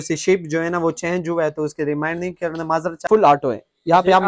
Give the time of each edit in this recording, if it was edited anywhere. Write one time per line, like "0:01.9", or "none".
0:03.1